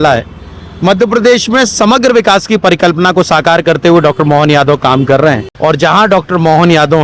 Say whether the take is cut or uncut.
cut